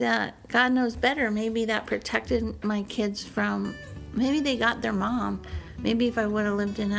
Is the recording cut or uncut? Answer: uncut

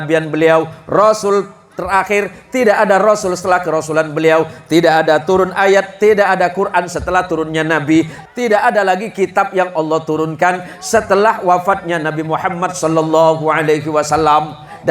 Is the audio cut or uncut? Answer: cut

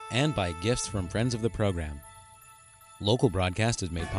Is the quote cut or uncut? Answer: uncut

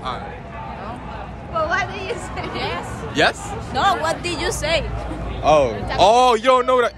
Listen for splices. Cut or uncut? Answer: uncut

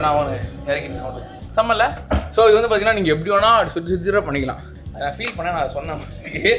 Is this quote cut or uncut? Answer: uncut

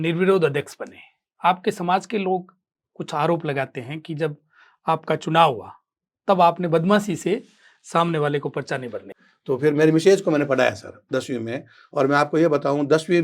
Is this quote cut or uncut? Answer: cut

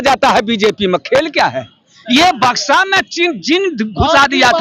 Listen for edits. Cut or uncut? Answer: uncut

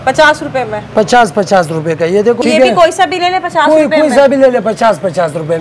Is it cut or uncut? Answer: cut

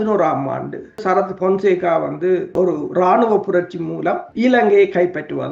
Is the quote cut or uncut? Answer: cut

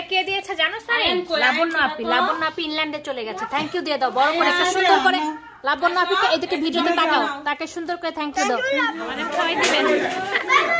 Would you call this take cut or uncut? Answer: cut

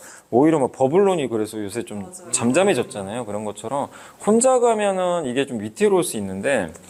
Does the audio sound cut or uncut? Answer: uncut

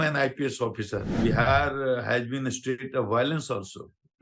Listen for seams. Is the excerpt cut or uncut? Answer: cut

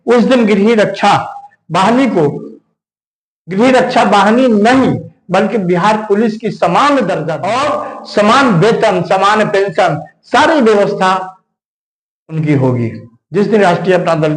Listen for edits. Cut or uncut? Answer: cut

